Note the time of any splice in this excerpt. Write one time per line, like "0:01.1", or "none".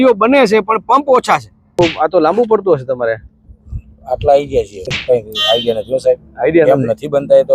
0:01.8
0:05.0